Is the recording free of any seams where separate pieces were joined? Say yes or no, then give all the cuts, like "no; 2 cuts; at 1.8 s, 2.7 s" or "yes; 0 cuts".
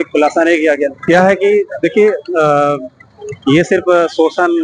no; 1 cut; at 0.9 s